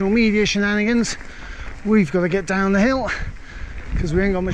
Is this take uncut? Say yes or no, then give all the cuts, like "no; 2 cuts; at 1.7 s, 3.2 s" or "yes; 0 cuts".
yes; 0 cuts